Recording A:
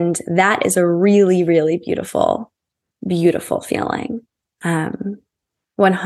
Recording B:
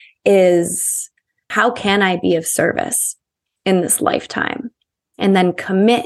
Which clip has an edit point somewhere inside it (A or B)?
B